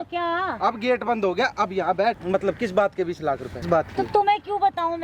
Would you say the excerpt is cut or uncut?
cut